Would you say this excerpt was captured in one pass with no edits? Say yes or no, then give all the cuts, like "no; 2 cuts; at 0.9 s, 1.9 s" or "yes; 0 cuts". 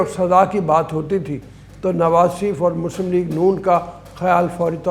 yes; 0 cuts